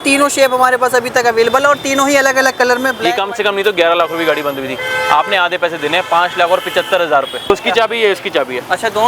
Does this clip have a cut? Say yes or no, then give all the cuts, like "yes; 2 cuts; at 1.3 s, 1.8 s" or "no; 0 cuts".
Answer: yes; 2 cuts; at 3.0 s, 7.5 s